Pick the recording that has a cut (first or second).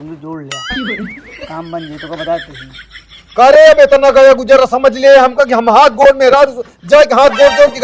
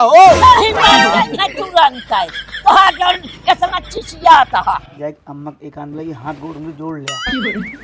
second